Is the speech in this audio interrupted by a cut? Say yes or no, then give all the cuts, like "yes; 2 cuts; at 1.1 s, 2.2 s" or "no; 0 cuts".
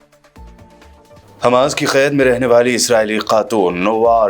yes; 1 cut; at 1.2 s